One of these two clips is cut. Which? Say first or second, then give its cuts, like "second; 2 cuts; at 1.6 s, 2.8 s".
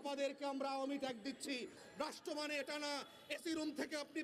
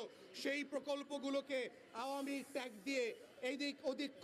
first; 1 cut; at 1.8 s